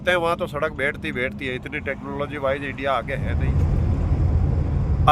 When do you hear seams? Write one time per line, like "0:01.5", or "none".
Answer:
0:03.3